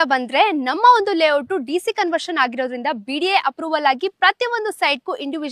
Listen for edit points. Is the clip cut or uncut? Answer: uncut